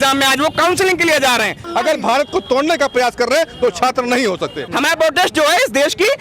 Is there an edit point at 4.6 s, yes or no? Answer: yes